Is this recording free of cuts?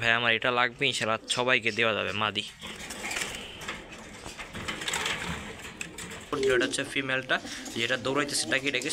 no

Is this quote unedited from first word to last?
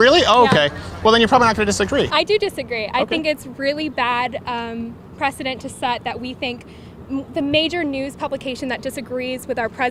yes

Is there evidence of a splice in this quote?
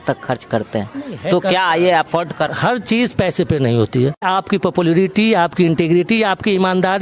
yes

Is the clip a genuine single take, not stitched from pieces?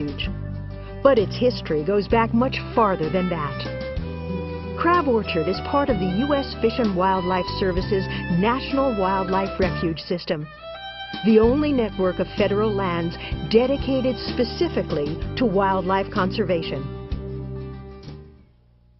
yes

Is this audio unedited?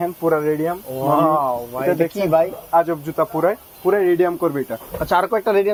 yes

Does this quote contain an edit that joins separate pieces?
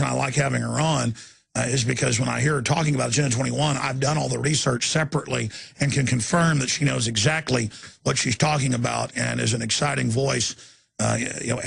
yes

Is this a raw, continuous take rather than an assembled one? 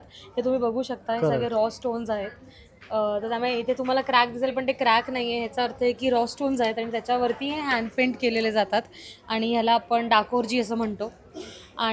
yes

